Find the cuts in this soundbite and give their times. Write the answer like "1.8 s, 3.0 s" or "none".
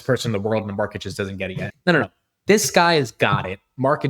1.5 s